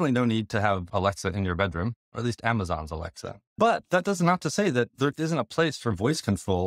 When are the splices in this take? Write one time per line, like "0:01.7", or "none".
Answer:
0:00.8
0:02.1
0:03.6